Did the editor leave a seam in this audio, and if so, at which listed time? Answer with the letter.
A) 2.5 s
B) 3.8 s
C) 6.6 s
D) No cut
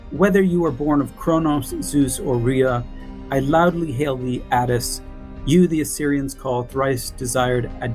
D